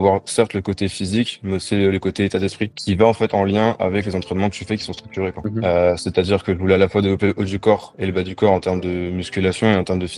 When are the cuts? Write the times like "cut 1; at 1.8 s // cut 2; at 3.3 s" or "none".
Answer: cut 1; at 2.8 s // cut 2; at 5.4 s